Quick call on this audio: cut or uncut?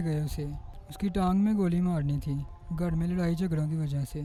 uncut